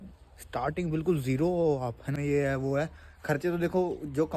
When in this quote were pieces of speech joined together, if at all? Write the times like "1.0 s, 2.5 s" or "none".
2.1 s